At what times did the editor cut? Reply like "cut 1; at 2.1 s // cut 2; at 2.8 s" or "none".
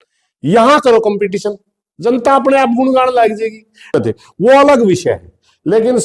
cut 1; at 3.9 s